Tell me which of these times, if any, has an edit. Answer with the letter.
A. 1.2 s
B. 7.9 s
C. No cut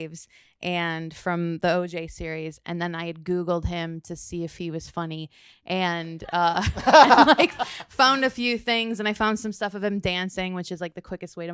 C